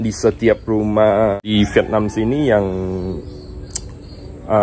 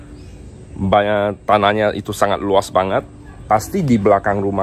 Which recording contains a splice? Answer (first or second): first